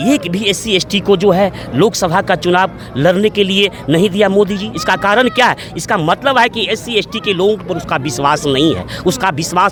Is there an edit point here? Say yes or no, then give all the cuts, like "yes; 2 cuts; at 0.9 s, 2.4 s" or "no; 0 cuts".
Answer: no; 0 cuts